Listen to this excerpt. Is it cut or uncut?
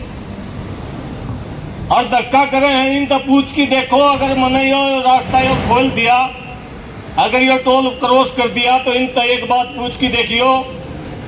uncut